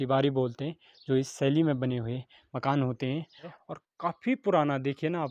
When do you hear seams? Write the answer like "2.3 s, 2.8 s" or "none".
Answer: 3.6 s